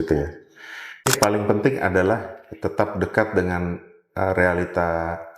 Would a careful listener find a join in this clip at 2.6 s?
no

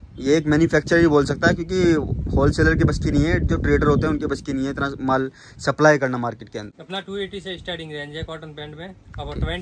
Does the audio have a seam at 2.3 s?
no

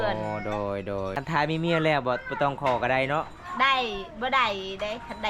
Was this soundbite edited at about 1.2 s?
yes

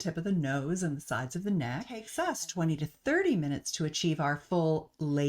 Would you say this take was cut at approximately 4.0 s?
no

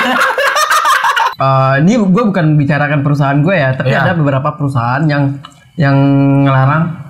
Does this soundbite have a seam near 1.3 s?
yes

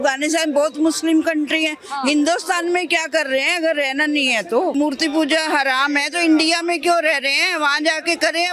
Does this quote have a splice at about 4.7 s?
yes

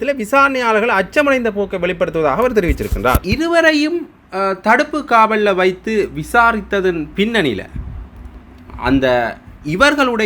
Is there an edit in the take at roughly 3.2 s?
yes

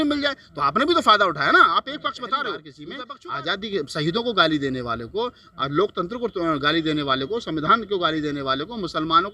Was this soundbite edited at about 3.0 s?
yes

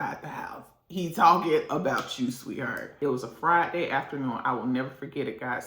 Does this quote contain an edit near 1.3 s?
no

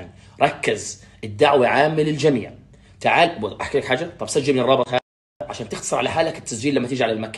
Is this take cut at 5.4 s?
yes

